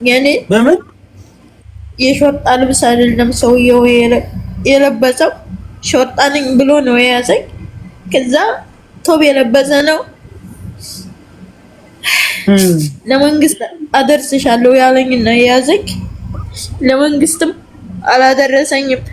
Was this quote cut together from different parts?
no; 0 cuts

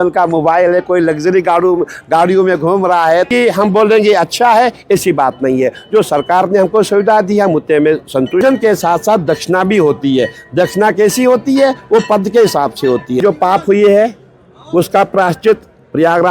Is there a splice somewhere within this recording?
yes; 3 cuts; at 3.3 s, 8.4 s, 13.2 s

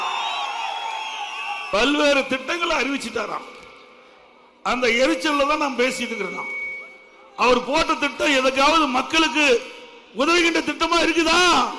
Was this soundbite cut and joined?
yes; 1 cut; at 1.6 s

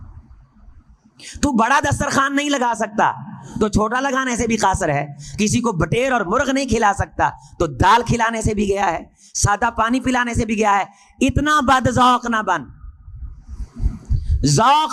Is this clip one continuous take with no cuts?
yes; 0 cuts

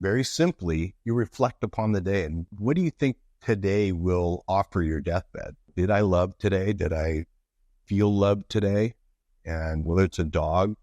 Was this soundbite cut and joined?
no; 0 cuts

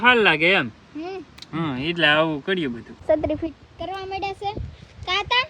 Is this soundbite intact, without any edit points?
no; 1 cut; at 2.9 s

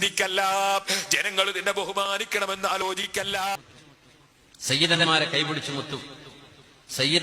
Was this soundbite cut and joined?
yes; 1 cut; at 3.7 s

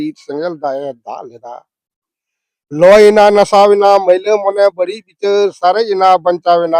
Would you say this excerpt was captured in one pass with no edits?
yes; 0 cuts

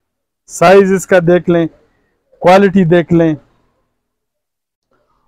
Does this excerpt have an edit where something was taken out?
no; 0 cuts

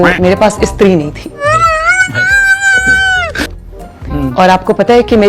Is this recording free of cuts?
no; 1 cut; at 3.6 s

